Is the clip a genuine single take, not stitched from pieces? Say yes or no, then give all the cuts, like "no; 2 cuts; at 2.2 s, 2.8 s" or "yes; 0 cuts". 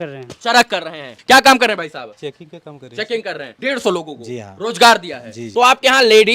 no; 3 cuts; at 1.1 s, 3.5 s, 5.4 s